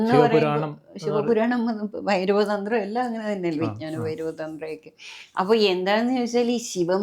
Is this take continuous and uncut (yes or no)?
yes